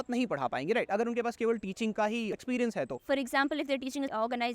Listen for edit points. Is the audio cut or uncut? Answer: cut